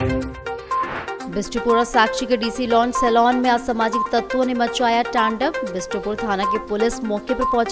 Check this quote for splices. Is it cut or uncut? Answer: uncut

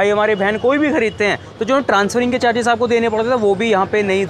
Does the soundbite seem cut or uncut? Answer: uncut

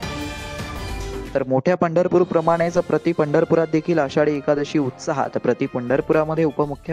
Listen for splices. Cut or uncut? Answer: cut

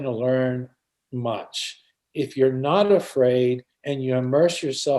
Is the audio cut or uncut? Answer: uncut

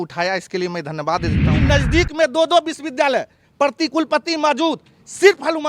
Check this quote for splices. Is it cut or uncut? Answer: cut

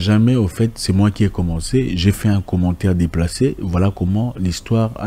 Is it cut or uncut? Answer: uncut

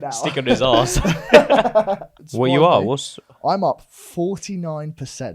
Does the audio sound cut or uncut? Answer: cut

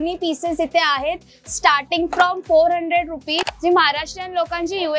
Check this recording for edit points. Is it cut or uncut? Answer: cut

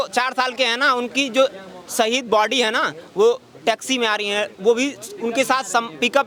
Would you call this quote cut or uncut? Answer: uncut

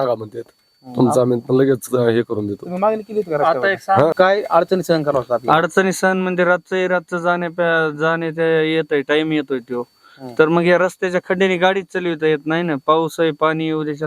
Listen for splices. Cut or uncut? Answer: cut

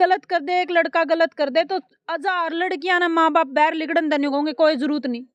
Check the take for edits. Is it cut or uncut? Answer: uncut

